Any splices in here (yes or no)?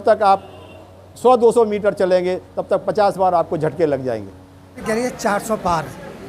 yes